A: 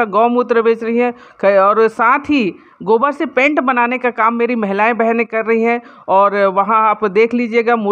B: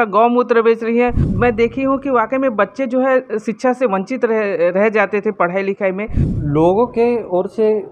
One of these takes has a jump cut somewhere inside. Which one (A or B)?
B